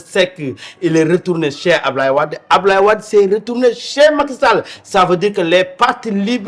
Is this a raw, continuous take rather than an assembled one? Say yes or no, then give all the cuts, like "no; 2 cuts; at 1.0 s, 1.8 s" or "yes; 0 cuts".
yes; 0 cuts